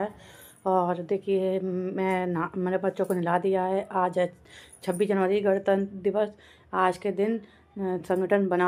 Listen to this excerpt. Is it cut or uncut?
uncut